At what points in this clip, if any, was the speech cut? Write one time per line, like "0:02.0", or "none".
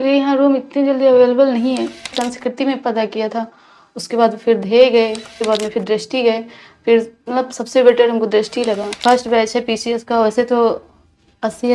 0:02.2
0:05.3
0:08.9